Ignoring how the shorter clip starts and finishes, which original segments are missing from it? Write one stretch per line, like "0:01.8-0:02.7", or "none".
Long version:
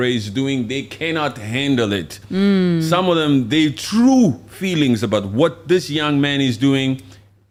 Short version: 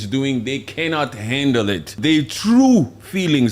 0:02.2-0:03.5